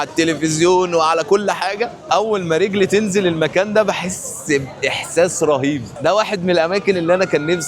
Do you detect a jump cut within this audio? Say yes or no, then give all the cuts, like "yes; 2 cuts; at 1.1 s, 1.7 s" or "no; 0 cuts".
yes; 1 cut; at 6.0 s